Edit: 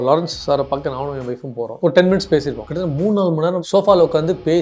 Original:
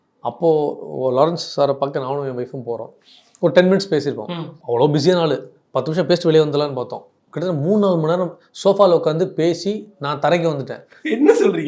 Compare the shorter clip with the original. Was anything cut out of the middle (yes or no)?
yes